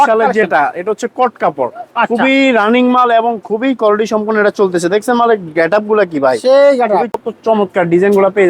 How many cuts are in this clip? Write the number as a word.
one